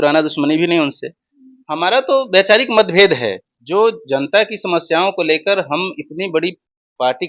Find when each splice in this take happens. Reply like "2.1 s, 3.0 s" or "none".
none